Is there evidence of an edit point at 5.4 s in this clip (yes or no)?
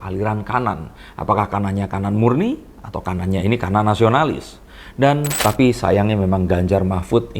yes